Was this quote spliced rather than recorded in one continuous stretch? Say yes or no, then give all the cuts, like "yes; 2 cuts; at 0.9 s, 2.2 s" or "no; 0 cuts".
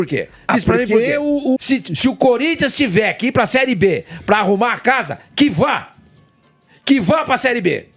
yes; 1 cut; at 1.6 s